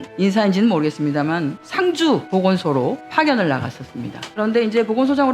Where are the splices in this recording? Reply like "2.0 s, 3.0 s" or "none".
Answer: 1.6 s, 3.0 s